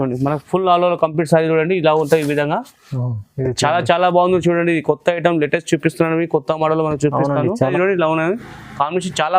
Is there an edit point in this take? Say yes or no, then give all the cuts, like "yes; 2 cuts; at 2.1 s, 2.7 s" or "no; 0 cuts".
yes; 1 cut; at 7.7 s